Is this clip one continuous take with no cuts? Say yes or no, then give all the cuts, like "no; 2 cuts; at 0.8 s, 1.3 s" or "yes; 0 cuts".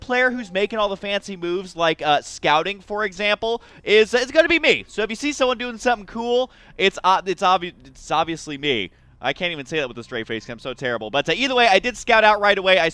yes; 0 cuts